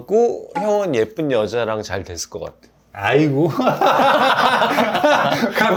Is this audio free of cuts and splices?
yes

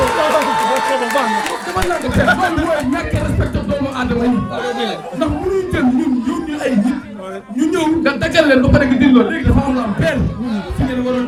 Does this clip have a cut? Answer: no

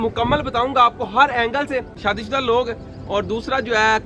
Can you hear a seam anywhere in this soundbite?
yes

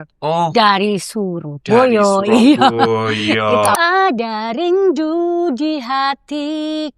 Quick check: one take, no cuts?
no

